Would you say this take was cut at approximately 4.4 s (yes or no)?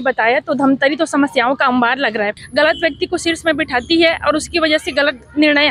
no